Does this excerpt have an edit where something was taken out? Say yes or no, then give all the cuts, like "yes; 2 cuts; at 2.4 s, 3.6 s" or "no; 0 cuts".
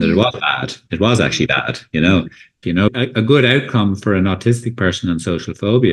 yes; 1 cut; at 2.9 s